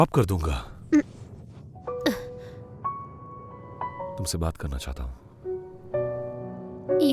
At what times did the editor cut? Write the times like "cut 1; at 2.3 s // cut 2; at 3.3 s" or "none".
cut 1; at 4.0 s